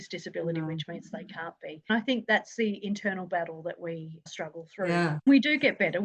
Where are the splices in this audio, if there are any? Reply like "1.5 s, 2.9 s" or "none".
1.9 s, 5.0 s